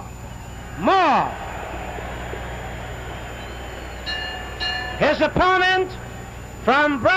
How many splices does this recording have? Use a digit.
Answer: 1